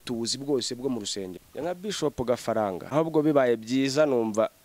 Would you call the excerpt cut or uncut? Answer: cut